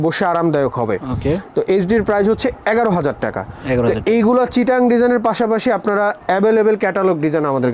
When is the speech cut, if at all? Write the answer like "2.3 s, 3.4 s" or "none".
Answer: none

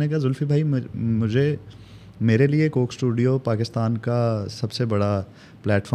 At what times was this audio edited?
none

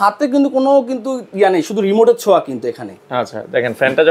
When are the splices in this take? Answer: none

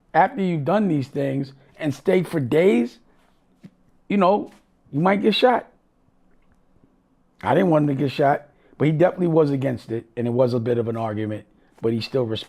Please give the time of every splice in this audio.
none

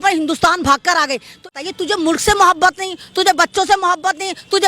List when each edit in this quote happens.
1.5 s

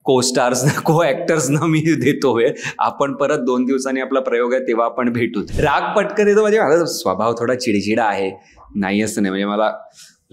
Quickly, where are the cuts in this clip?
5.5 s

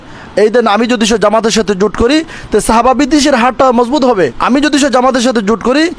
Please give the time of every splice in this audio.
4.4 s

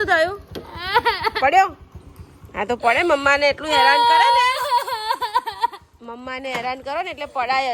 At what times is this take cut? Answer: none

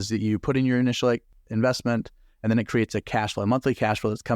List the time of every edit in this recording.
1.3 s

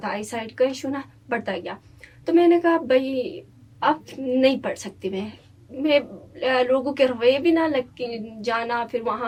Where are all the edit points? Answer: none

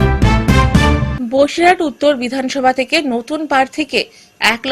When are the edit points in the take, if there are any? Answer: 1.2 s

